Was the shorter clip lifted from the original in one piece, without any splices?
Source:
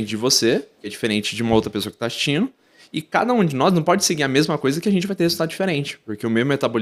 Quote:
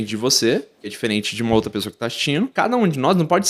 no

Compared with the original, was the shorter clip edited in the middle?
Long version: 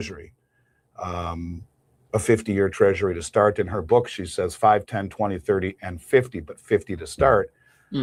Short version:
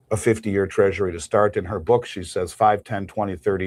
no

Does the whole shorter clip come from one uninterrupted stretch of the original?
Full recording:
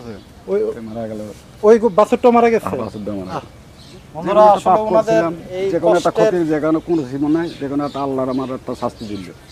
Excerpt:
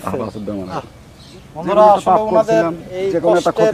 yes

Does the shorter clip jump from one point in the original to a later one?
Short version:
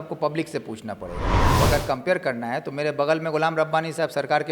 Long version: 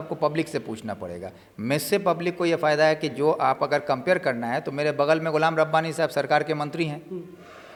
yes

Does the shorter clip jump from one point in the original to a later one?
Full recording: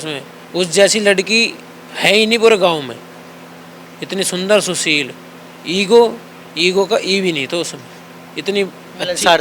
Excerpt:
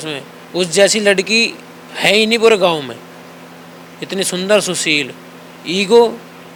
no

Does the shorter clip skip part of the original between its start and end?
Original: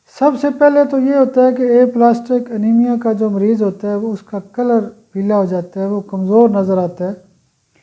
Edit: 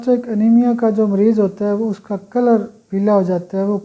no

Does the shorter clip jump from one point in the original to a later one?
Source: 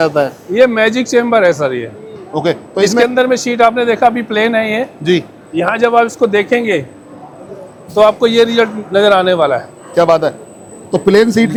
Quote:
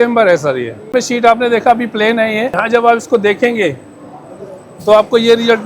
yes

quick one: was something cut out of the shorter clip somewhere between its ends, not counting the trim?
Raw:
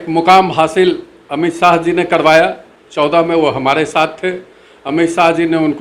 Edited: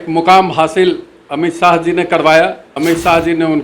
yes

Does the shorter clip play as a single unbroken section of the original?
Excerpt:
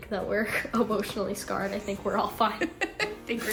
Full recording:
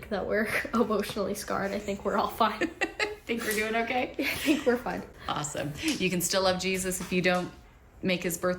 yes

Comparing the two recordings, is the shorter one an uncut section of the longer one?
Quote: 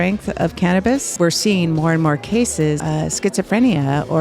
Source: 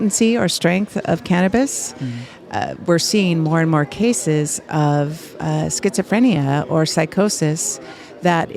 no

